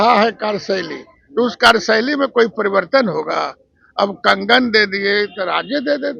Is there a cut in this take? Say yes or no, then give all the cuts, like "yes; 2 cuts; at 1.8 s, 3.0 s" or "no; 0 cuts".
no; 0 cuts